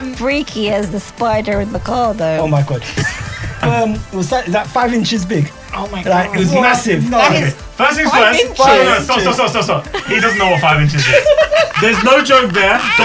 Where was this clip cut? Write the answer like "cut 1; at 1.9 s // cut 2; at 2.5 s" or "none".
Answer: cut 1; at 3.6 s